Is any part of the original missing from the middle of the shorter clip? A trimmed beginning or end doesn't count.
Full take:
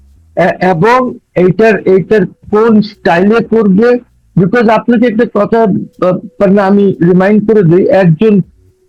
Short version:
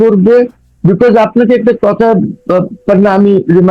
no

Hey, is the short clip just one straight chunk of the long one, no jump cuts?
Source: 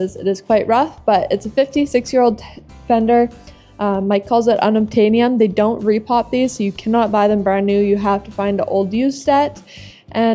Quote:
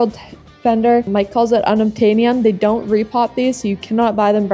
no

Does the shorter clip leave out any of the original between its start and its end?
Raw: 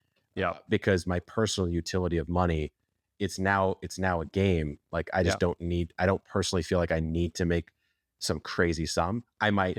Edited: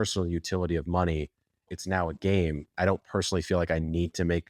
yes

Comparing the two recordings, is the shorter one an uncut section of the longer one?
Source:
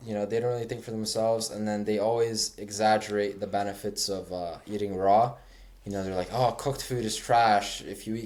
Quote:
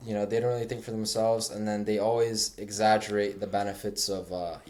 yes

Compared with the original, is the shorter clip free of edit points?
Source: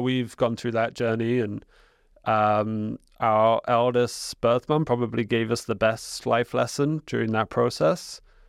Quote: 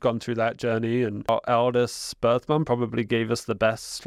no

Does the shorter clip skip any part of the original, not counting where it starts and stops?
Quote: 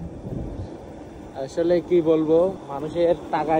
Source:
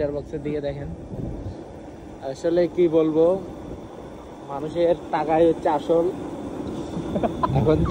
yes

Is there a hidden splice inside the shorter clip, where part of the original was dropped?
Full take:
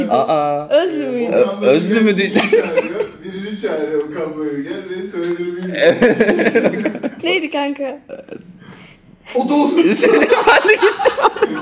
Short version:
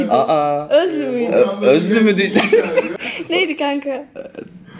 yes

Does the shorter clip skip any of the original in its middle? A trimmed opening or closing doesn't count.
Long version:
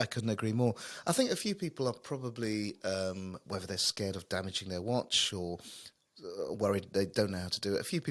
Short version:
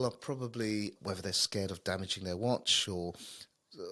yes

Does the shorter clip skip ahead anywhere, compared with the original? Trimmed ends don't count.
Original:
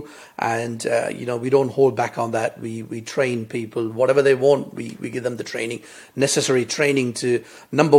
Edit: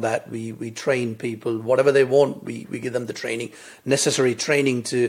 no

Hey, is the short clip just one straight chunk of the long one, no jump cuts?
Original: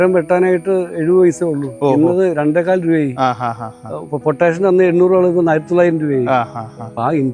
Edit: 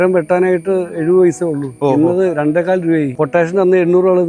no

